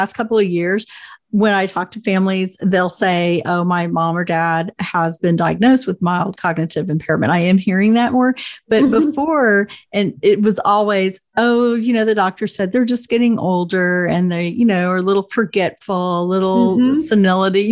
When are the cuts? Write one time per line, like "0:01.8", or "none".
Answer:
none